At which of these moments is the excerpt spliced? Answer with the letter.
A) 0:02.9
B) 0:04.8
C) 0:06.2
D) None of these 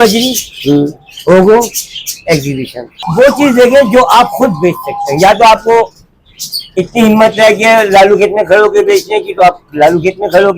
A